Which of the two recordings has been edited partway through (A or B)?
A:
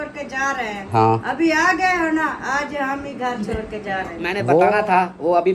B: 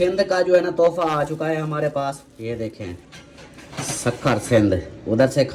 A